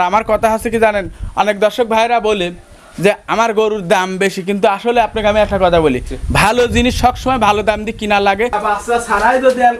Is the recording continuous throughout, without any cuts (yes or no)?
no